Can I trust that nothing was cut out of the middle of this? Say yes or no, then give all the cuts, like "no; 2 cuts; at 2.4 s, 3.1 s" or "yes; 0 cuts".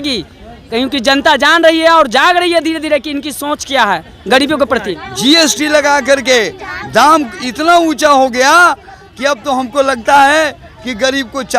no; 1 cut; at 5.0 s